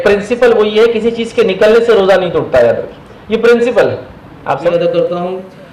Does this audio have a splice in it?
yes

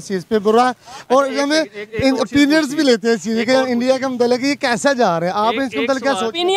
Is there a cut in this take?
no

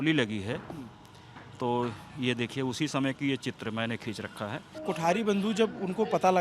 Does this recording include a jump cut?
yes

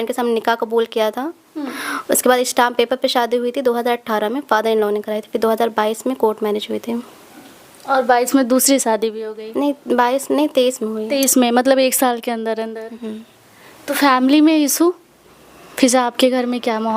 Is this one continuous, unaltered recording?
yes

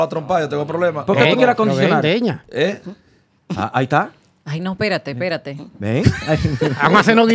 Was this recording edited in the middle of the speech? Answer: no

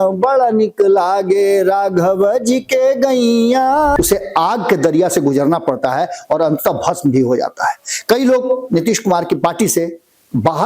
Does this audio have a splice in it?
yes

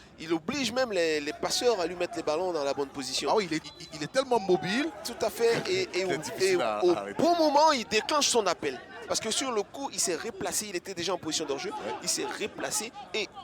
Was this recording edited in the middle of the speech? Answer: yes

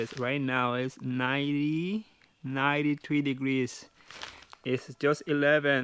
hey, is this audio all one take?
yes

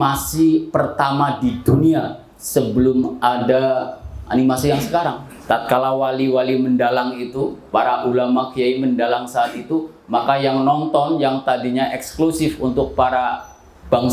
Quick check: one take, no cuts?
no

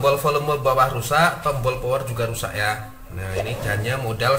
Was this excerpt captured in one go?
yes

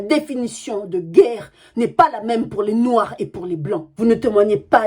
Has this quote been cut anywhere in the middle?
yes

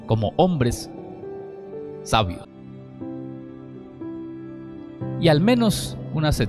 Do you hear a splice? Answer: yes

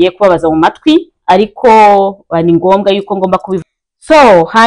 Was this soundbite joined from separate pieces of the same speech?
yes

